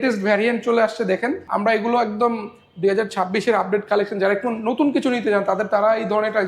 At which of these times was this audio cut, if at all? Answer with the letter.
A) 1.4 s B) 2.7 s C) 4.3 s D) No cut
A